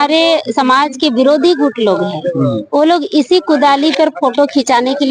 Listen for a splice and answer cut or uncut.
uncut